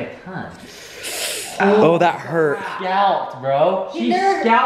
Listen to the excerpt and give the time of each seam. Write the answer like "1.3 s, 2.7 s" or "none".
none